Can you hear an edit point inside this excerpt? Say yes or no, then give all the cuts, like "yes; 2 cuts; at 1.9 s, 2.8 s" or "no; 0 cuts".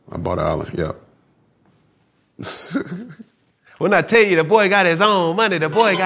yes; 1 cut; at 3.6 s